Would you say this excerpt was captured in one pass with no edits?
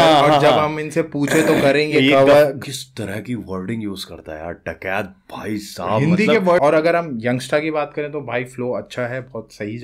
no; 2 cuts; at 2.6 s, 6.6 s

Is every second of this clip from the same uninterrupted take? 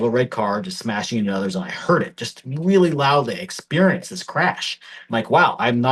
yes; 0 cuts

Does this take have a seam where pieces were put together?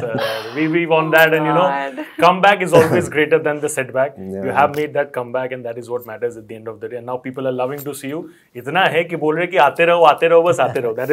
no; 0 cuts

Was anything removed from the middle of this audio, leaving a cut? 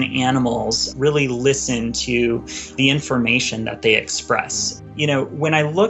yes; 3 cuts; at 0.9 s, 2.8 s, 4.6 s

